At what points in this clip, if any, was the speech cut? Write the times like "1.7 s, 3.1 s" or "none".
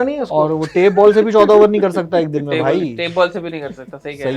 none